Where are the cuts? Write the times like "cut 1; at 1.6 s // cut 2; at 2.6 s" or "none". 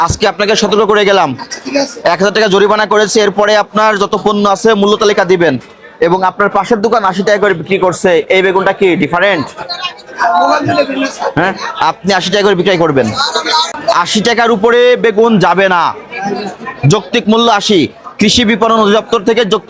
cut 1; at 13.7 s

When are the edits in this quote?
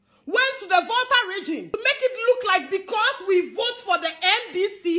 cut 1; at 1.7 s

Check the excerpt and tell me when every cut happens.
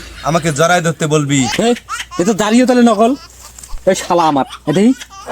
cut 1; at 1.5 s

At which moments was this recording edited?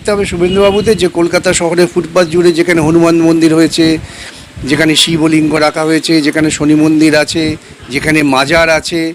none

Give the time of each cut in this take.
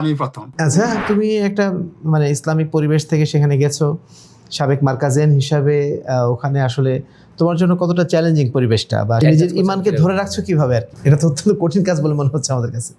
cut 1; at 1.0 s // cut 2; at 9.2 s // cut 3; at 10.9 s

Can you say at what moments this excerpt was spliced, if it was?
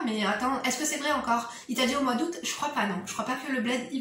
none

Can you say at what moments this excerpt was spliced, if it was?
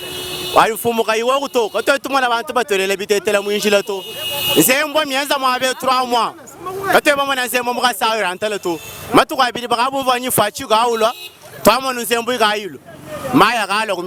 none

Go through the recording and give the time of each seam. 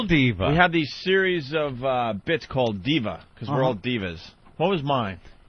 cut 1; at 0.9 s

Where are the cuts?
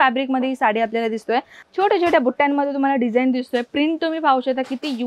cut 1; at 1.6 s

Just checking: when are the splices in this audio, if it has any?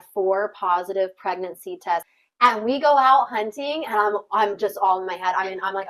cut 1; at 2.2 s

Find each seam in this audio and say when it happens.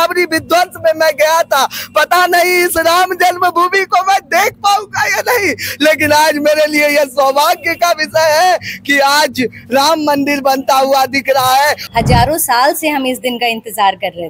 cut 1; at 11.8 s

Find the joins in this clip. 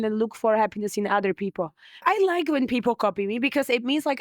cut 1; at 2.0 s

